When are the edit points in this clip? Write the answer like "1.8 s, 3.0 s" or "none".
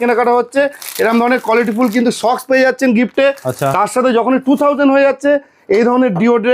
none

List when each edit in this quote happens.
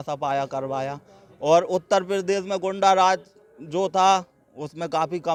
none

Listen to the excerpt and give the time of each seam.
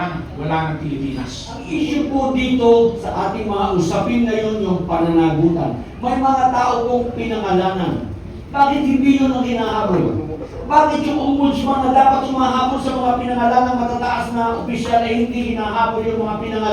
1.6 s

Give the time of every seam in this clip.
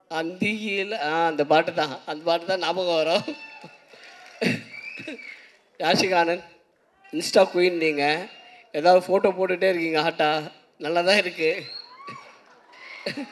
none

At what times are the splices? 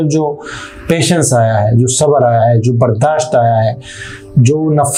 none

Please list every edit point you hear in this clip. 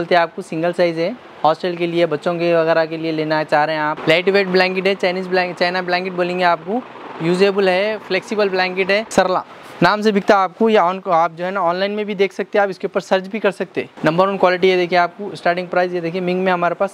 4.0 s, 9.1 s, 13.8 s

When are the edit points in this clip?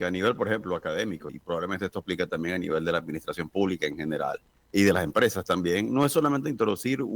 1.3 s, 4.5 s

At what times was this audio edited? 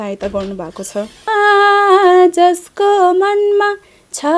1.3 s

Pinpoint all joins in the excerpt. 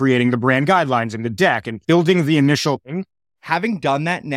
1.7 s, 2.9 s

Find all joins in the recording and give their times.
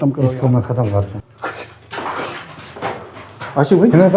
1.2 s

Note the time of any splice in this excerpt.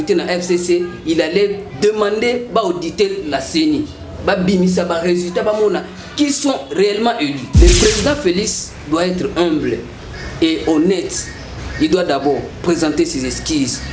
7.4 s

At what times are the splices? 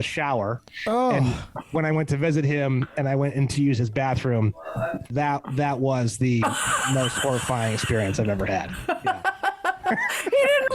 5.1 s

